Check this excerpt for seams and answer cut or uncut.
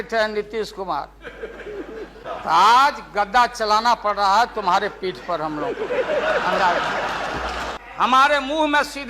cut